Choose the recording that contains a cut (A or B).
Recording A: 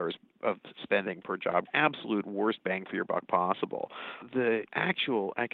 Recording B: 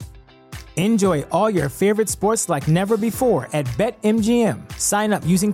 A